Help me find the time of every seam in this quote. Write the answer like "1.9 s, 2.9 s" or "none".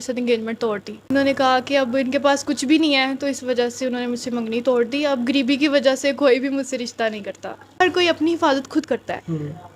1.1 s, 7.8 s

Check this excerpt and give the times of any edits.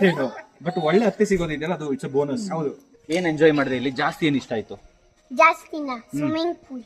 2.9 s

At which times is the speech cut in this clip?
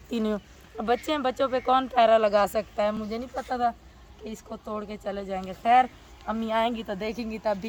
none

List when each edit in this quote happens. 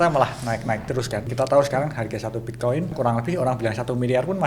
1.3 s, 2.9 s

